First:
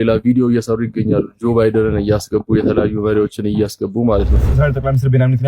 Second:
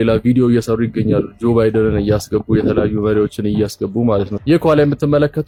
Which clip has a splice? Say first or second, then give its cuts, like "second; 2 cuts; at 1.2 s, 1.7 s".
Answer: first; 1 cut; at 4.4 s